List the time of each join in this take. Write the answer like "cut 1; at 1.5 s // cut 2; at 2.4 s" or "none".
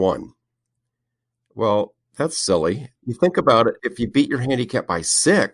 cut 1; at 2.9 s // cut 2; at 3.8 s